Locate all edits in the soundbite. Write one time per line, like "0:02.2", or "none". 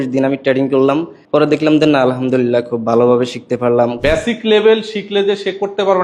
0:01.1
0:04.0